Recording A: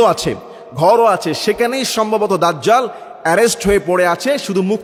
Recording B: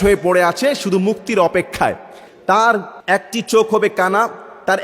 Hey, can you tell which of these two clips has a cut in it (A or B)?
B